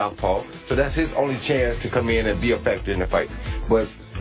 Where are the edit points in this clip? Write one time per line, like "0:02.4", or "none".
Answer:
none